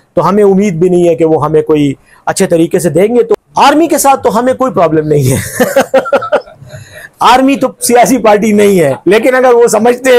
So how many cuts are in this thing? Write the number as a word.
one